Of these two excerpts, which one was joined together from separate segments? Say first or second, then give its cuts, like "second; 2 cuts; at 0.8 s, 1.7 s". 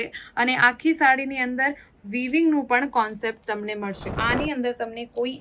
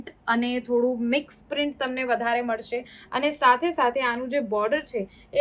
first; 1 cut; at 4.2 s